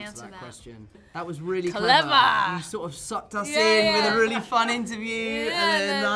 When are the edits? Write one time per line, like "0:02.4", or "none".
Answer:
0:01.0